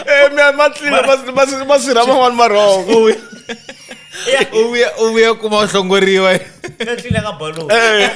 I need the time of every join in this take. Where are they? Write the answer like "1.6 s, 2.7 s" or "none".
none